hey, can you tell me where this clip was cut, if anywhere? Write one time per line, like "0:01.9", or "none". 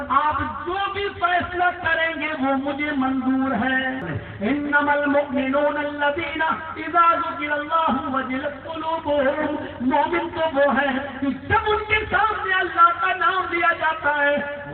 0:04.2